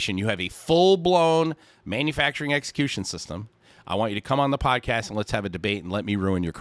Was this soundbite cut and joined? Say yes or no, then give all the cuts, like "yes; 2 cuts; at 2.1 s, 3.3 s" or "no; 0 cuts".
no; 0 cuts